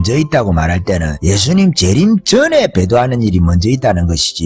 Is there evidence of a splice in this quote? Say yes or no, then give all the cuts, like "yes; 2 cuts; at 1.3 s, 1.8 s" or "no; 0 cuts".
yes; 1 cut; at 1.1 s